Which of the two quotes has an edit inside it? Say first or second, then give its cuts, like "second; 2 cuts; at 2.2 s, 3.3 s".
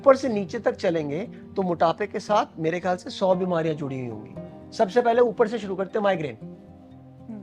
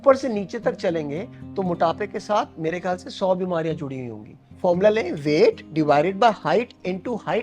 second; 1 cut; at 4.5 s